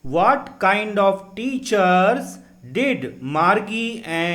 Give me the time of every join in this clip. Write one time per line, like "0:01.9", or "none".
none

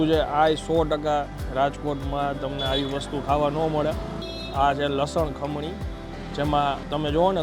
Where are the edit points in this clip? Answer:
0:01.4

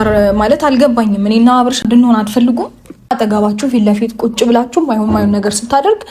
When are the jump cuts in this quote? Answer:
0:01.8
0:03.1

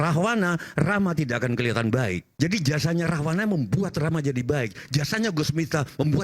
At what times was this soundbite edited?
0:02.3

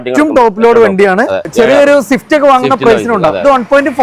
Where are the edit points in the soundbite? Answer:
0:01.5

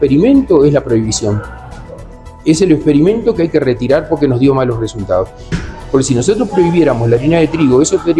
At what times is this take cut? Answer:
0:05.5

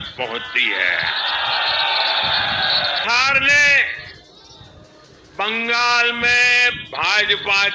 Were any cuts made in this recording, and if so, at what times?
0:03.0

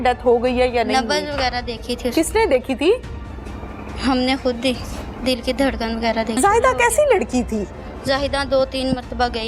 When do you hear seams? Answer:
0:06.4

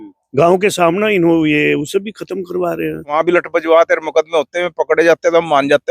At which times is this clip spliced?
0:03.1

